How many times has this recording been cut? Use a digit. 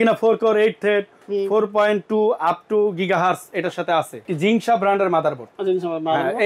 1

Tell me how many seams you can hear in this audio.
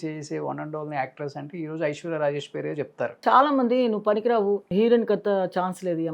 2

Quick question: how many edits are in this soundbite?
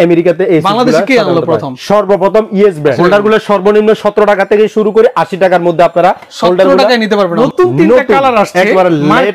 2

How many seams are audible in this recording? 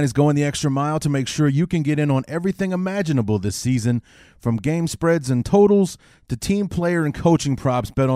0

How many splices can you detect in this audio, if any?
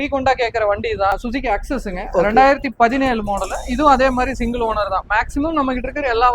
1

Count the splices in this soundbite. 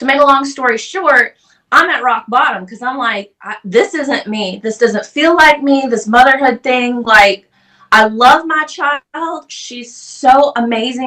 0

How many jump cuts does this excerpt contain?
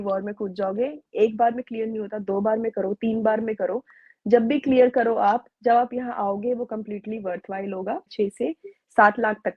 1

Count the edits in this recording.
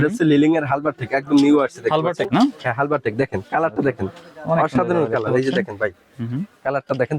0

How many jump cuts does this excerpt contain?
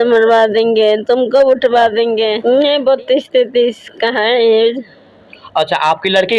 1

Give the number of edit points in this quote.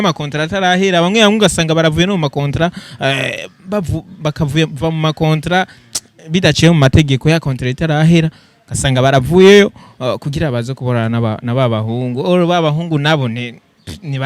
0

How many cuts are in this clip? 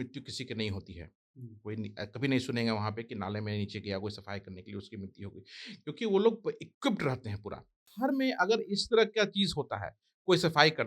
1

